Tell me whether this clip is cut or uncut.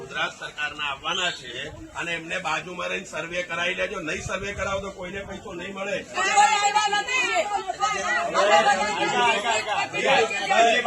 cut